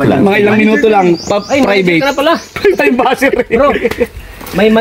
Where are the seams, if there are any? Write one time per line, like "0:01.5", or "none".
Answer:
none